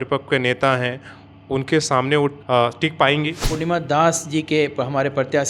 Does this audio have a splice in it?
yes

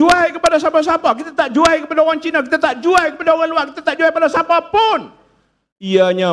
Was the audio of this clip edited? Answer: no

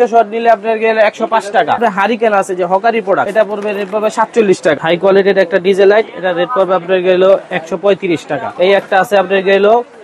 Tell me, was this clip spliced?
yes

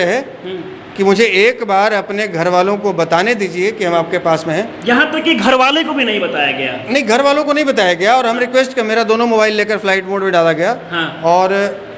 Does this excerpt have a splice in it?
no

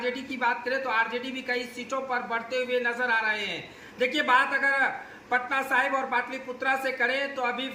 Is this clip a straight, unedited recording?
yes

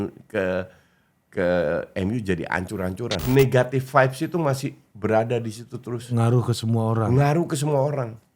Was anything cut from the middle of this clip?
yes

